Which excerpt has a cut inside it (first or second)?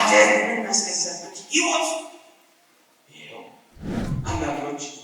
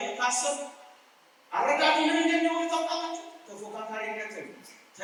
first